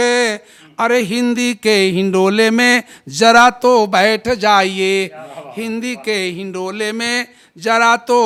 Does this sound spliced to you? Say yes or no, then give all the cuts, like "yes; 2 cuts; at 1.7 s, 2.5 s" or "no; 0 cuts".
no; 0 cuts